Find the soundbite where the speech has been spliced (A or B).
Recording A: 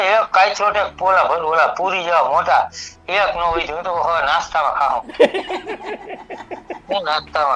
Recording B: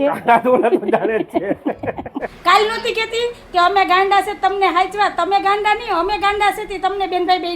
B